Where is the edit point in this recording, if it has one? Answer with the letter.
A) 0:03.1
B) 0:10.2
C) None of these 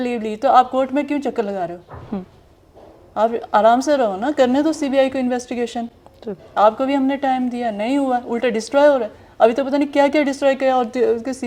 C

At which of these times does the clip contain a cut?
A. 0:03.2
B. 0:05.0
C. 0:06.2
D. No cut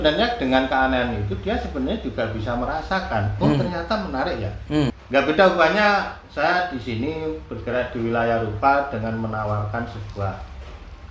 B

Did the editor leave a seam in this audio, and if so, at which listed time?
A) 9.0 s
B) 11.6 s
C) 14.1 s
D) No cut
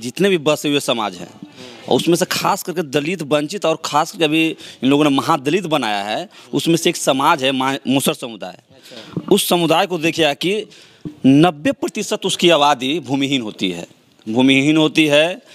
D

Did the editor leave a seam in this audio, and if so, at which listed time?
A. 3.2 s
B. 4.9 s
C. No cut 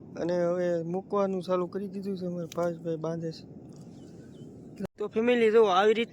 B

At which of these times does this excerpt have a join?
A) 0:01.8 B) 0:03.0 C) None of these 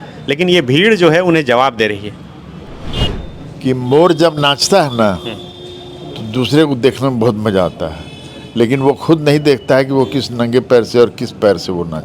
B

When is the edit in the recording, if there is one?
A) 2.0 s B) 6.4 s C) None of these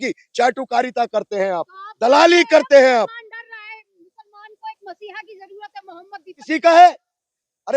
B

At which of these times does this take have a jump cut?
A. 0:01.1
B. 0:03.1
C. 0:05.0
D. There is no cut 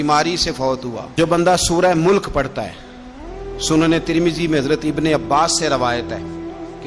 A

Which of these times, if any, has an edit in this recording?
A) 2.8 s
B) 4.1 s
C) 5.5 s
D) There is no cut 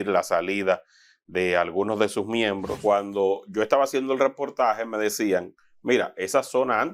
A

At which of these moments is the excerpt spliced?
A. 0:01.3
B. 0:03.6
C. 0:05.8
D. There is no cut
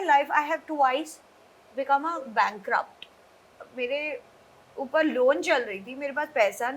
B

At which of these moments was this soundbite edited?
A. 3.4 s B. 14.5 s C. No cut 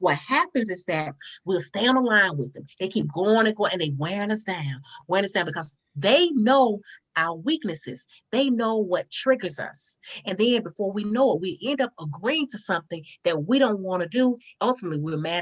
B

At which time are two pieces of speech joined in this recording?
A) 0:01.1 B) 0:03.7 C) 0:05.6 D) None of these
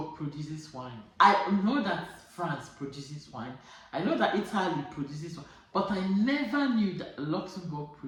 D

